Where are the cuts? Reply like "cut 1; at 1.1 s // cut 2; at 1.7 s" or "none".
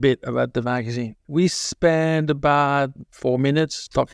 none